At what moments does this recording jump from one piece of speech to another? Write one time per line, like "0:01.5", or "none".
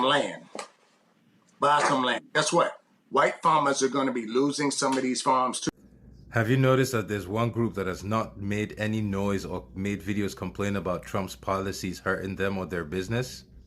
0:05.7